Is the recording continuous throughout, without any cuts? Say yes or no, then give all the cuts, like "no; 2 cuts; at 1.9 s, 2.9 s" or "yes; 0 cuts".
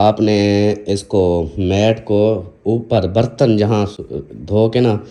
yes; 0 cuts